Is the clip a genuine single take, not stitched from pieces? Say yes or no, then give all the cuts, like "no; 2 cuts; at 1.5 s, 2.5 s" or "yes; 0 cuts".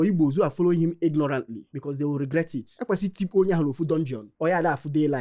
yes; 0 cuts